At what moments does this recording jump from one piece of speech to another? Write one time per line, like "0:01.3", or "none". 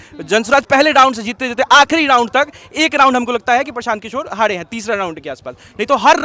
none